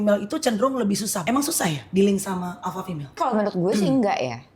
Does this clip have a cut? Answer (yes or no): yes